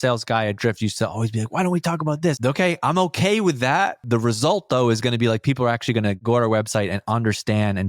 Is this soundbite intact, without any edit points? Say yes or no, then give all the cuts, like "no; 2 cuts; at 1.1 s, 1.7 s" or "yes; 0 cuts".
no; 3 cuts; at 2.4 s, 4.0 s, 6.2 s